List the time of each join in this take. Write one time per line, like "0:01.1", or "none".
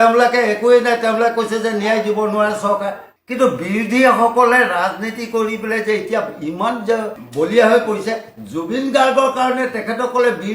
0:03.1